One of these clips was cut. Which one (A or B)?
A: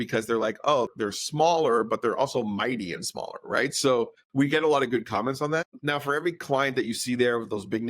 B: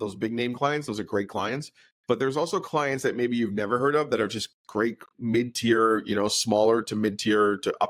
A